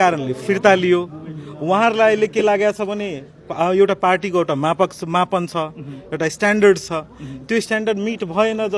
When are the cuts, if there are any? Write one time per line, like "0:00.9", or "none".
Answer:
none